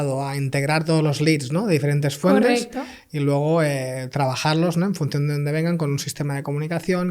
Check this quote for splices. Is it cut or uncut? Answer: uncut